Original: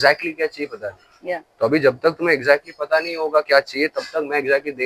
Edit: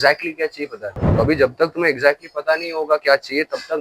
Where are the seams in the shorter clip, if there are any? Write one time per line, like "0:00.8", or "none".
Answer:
0:01.0

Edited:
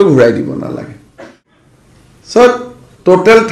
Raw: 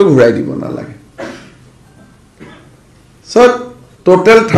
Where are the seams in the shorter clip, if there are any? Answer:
0:01.1

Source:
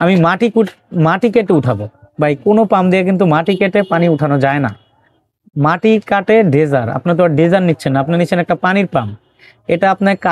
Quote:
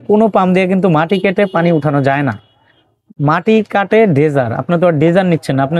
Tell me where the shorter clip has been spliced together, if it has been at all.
none

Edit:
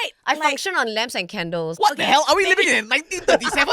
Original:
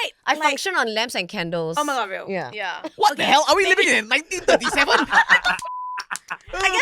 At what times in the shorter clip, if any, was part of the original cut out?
0:01.7

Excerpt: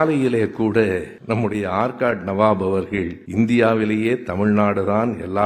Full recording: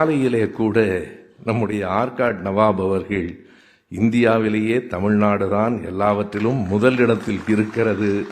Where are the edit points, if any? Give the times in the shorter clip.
0:01.1
0:03.2

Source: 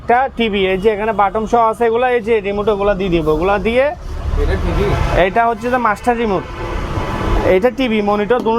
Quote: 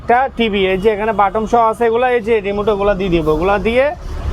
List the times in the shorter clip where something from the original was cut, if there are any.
none

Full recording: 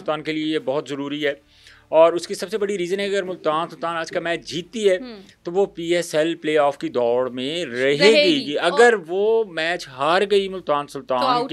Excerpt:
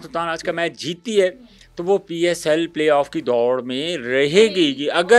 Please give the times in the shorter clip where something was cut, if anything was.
none

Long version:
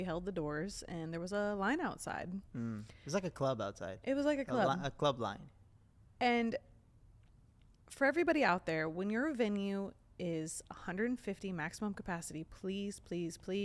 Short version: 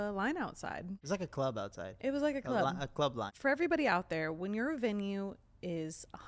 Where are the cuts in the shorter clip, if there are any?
0:00.9
0:03.3

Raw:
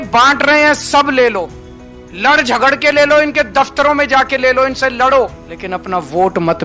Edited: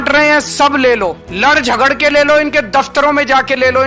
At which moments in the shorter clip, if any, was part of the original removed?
0:01.2

